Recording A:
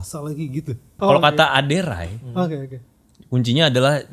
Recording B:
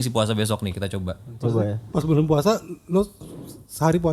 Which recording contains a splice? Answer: A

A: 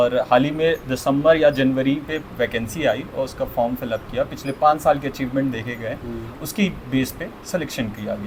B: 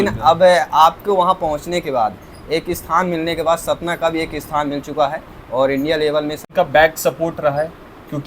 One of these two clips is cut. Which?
B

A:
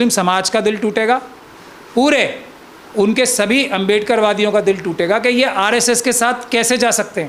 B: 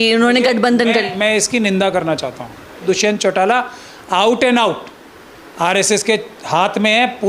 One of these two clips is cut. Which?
B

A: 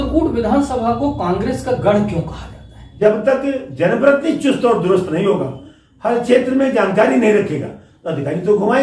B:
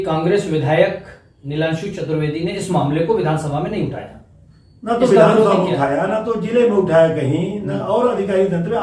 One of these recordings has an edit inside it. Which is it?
A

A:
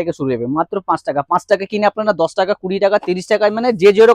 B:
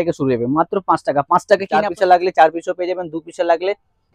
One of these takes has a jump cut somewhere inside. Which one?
B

